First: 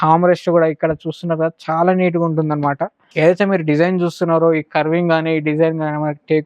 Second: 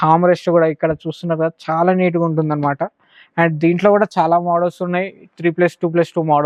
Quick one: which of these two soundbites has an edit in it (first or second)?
first